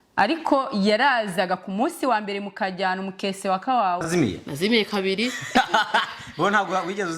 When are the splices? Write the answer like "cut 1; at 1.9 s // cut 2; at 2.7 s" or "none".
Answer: cut 1; at 4.1 s